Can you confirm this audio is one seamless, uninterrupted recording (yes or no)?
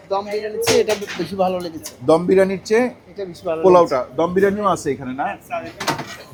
yes